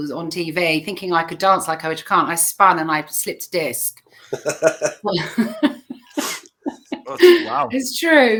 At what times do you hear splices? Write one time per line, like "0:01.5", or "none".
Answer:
none